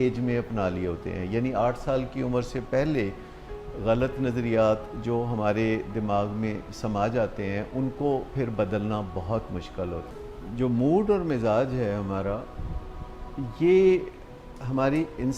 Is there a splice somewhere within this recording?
yes; 1 cut; at 10.1 s

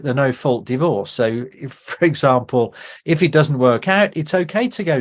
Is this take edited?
no; 0 cuts

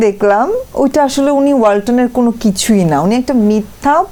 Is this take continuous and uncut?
yes; 0 cuts

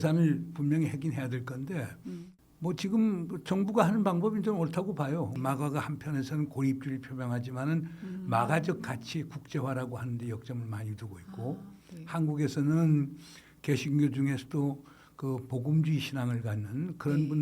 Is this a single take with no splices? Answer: no; 1 cut; at 5.3 s

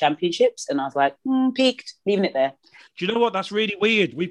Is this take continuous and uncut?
no; 1 cut; at 2.8 s

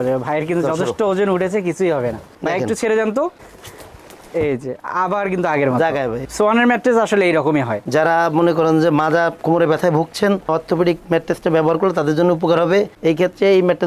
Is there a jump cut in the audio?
yes; 3 cuts; at 2.3 s, 6.2 s, 7.8 s

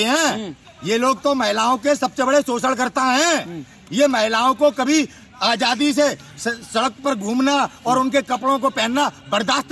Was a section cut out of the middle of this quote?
no; 0 cuts

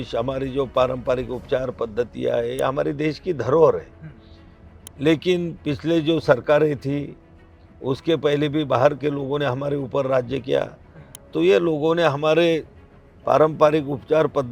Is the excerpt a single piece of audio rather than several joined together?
yes; 0 cuts

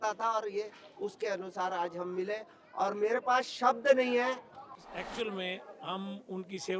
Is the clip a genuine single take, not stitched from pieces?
no; 1 cut; at 4.7 s

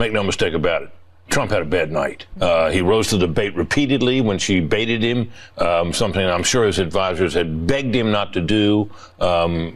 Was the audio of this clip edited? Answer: yes; 1 cut; at 2.2 s

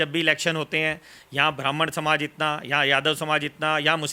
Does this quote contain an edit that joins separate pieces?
no; 0 cuts

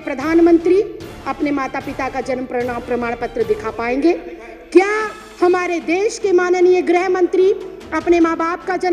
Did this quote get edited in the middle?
no; 0 cuts

